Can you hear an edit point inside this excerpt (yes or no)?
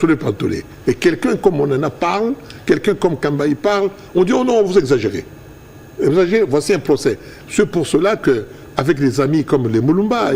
no